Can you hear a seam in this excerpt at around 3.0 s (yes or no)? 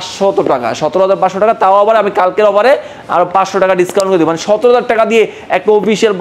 no